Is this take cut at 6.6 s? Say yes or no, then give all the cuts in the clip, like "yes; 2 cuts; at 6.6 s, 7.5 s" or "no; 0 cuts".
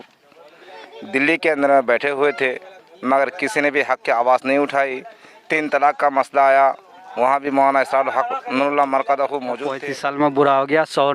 no; 1 cut; at 9.7 s